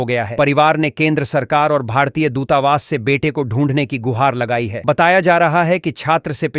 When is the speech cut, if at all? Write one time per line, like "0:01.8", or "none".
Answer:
none